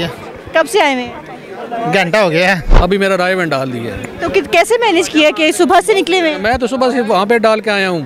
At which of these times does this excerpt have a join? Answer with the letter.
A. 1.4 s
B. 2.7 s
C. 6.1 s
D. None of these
B